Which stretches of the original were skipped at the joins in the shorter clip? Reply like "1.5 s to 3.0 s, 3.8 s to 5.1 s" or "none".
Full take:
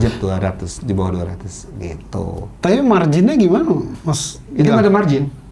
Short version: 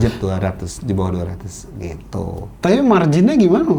none